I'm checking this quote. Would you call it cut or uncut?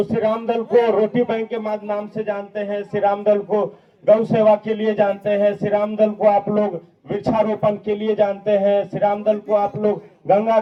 uncut